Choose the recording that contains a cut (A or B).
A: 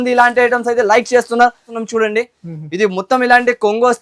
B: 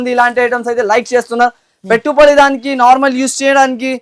A